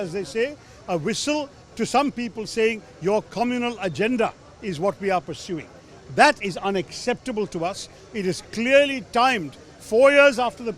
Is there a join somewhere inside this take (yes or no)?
no